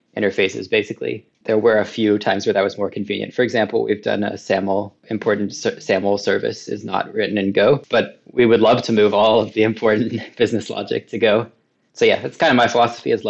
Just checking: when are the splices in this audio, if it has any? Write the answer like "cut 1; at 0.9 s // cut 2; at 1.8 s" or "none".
cut 1; at 1.3 s // cut 2; at 5.0 s

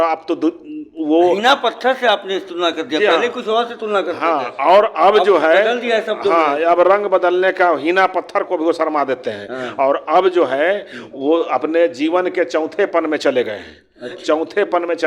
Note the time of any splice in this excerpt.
none

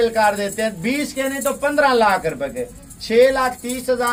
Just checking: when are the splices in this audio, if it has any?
none

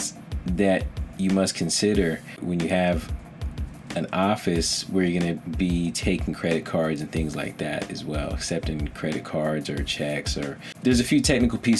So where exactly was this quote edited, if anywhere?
cut 1; at 2.4 s // cut 2; at 10.7 s

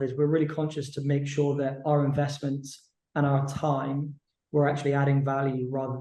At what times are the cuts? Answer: none

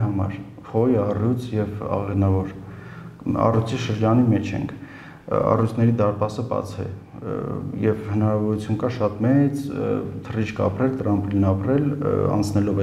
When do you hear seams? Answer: none

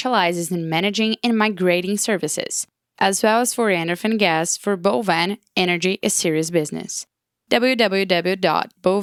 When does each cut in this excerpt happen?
none

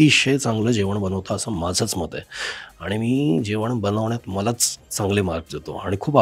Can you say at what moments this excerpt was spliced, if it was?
none

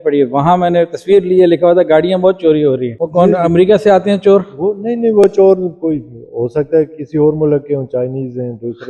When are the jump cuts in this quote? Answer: cut 1; at 2.9 s

